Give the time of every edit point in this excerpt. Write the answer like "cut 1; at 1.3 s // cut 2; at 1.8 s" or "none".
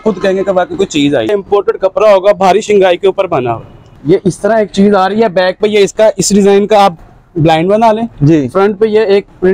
cut 1; at 1.3 s // cut 2; at 3.8 s